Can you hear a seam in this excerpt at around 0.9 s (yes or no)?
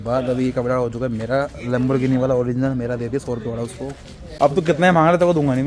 no